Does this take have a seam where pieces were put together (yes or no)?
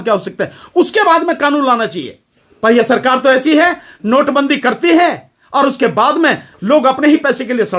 no